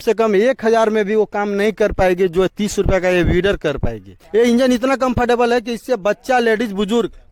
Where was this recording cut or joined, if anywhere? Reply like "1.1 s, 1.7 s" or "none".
4.1 s